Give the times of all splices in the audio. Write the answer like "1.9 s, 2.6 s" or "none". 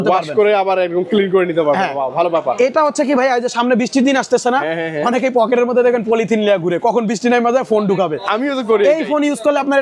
none